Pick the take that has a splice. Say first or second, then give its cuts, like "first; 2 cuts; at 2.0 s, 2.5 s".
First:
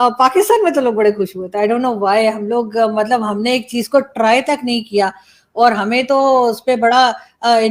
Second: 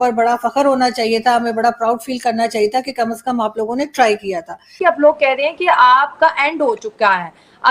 second; 1 cut; at 4.8 s